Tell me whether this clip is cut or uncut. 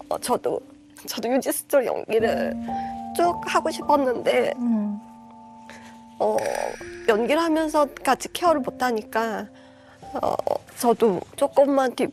uncut